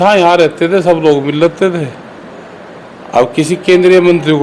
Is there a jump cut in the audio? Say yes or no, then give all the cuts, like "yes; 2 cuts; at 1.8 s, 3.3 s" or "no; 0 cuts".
no; 0 cuts